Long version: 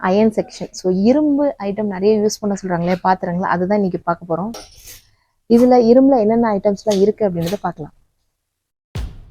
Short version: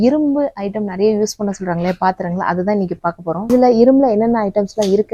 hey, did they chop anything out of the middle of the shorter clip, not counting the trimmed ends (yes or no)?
yes